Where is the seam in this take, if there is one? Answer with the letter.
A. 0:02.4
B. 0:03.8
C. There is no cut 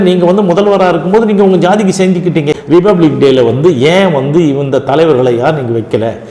A